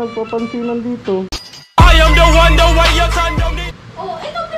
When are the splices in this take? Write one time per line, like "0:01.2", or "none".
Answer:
0:01.4
0:03.4